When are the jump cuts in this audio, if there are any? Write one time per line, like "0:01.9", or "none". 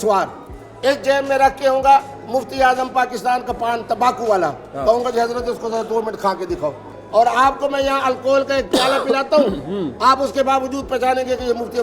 0:06.9